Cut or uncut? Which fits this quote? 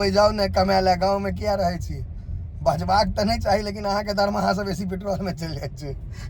uncut